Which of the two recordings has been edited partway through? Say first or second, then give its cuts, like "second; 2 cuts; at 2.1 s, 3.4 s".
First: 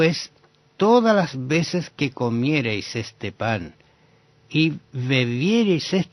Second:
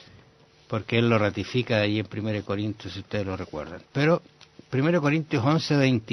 first; 1 cut; at 2.9 s